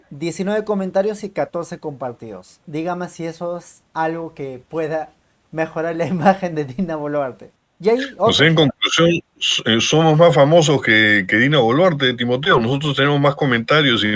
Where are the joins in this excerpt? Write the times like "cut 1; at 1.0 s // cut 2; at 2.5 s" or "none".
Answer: cut 1; at 7.4 s